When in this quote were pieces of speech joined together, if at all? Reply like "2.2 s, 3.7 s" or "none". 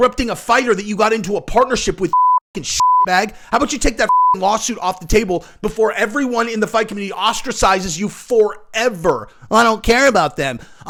none

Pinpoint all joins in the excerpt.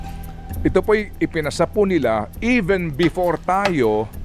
none

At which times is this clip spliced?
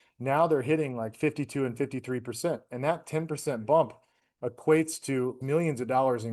5.4 s

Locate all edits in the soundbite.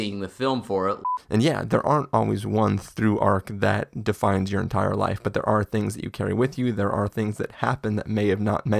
1.0 s

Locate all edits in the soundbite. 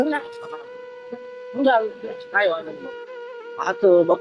2.7 s

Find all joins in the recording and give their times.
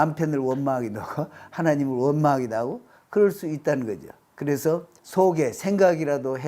5.0 s

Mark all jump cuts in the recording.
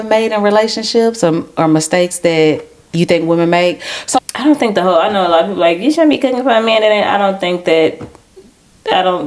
4.2 s

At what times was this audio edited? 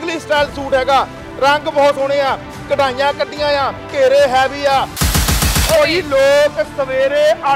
5.2 s

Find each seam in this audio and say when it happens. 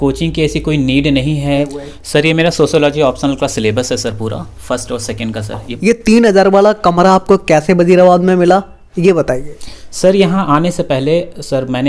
1.8 s, 5.7 s

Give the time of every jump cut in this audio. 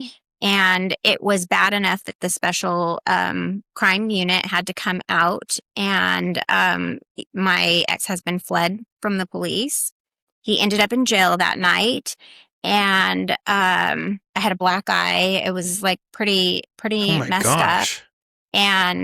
none

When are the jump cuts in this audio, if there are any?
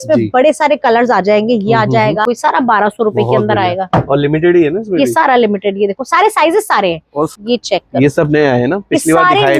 2.2 s, 7.3 s

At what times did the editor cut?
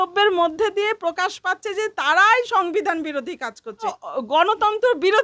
4.0 s

